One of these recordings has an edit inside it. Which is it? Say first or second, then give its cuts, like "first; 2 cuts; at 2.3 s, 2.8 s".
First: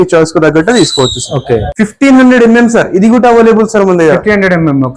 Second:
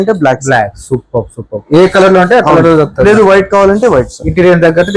first; 1 cut; at 1.7 s